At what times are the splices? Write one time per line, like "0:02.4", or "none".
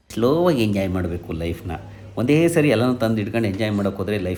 none